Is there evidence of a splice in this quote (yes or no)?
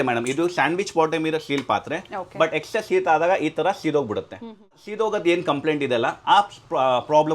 yes